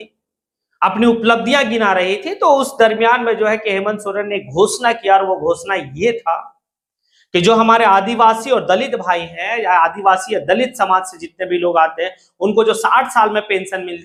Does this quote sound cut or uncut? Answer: uncut